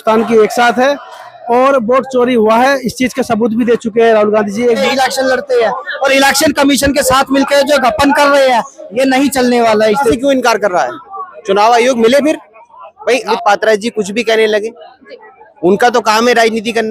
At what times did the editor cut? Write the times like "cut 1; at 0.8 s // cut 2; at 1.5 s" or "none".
cut 1; at 4.8 s // cut 2; at 10.1 s // cut 3; at 13.3 s